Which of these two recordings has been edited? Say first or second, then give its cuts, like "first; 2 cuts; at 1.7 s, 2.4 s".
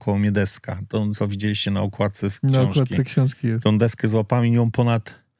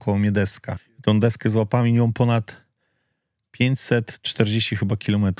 second; 1 cut; at 0.9 s